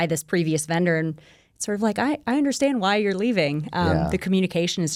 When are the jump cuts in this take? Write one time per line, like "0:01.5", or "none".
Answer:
none